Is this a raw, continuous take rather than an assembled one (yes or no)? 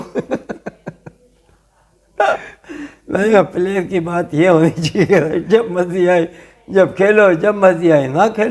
yes